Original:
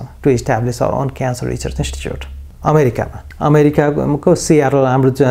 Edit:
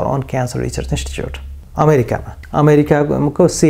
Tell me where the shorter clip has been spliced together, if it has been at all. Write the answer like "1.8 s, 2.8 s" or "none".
none